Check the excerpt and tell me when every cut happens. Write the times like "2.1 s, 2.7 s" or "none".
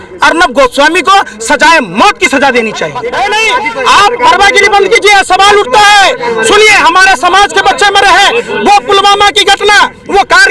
3.0 s